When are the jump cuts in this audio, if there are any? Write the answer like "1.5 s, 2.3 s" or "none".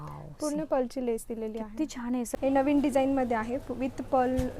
2.3 s